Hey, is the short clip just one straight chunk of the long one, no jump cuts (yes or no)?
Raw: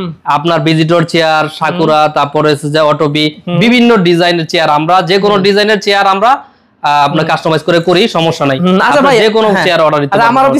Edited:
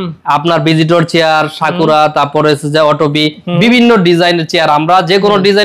yes